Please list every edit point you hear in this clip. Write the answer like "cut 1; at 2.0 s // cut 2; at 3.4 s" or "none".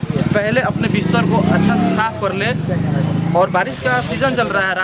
none